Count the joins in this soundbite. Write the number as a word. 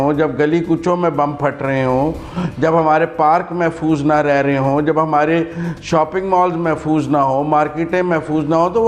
zero